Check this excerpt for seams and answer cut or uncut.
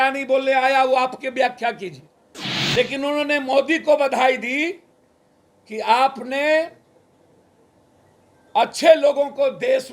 uncut